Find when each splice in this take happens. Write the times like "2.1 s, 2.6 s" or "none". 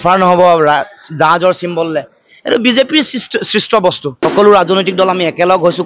4.2 s